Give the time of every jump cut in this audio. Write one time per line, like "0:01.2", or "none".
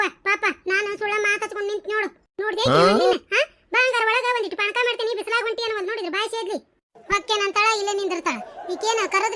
none